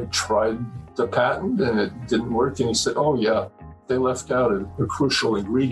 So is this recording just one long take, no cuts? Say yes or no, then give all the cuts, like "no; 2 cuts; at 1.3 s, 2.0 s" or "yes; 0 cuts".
no; 1 cut; at 4.7 s